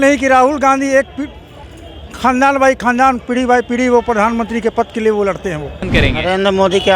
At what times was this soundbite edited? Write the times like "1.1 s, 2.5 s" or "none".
5.8 s

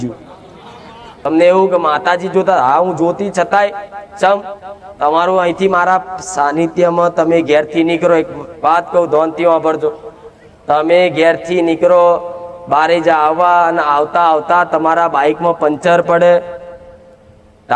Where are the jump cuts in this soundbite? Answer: 1.3 s

